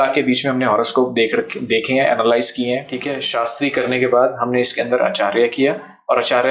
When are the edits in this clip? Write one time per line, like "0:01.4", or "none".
0:03.3